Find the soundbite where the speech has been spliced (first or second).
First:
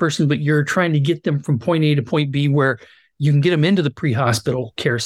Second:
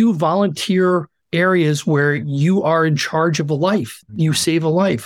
second